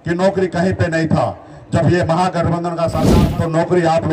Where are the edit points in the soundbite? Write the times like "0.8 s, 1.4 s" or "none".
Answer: 3.2 s